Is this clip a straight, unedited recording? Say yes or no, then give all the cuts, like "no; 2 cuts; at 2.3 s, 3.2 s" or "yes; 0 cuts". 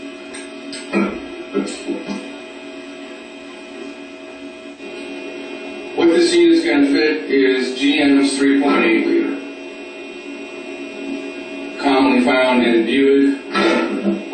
yes; 0 cuts